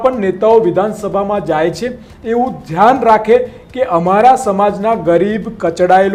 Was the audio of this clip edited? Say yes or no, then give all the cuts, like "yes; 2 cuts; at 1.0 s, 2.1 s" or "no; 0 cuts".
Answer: no; 0 cuts